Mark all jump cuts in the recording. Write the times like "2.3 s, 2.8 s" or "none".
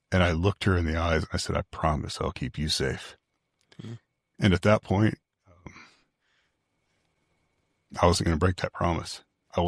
none

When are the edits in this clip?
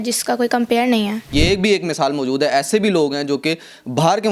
1.3 s

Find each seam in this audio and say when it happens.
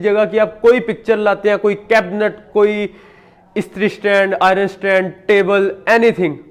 none

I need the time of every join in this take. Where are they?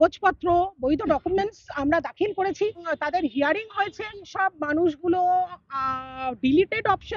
2.9 s, 4.3 s

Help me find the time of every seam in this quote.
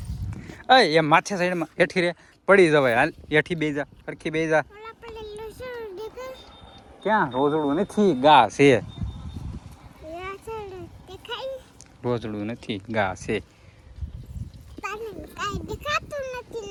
none

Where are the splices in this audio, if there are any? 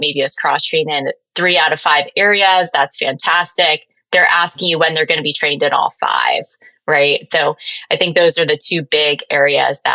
1.2 s

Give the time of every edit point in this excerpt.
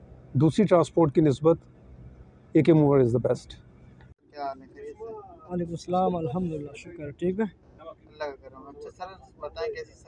none

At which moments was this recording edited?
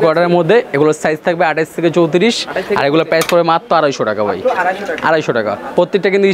none

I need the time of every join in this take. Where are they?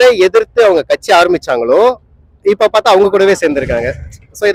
none

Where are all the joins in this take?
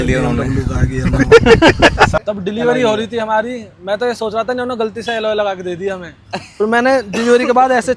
2.1 s

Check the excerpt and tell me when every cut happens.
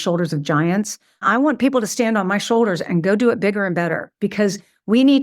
none

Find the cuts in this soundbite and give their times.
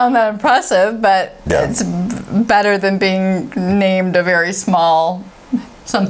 none

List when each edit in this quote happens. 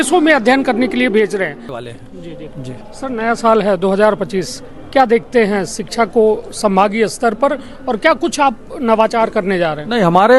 1.8 s

